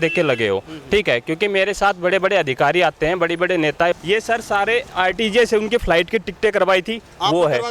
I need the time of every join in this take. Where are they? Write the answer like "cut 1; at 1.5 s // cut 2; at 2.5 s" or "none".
cut 1; at 3.9 s